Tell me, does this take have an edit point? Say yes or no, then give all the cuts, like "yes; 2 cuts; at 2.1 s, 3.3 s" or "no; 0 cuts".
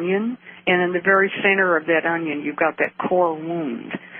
yes; 1 cut; at 2.5 s